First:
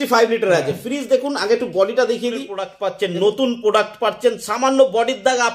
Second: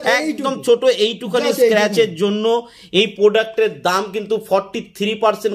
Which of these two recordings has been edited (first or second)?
first